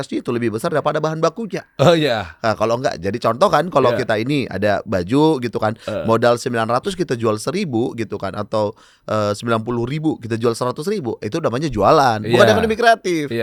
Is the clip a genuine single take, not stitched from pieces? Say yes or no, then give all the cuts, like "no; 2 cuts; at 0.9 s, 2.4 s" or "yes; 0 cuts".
yes; 0 cuts